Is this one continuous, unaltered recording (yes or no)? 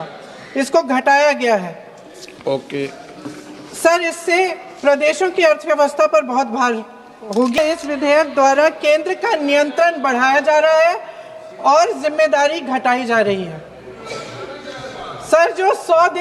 no